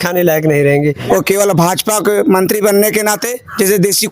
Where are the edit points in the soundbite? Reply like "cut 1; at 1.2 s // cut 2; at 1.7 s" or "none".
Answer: cut 1; at 1.0 s